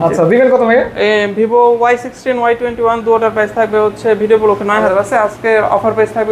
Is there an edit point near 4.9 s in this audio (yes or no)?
yes